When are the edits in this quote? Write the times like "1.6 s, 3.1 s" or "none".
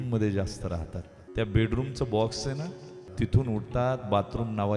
1.2 s, 3.1 s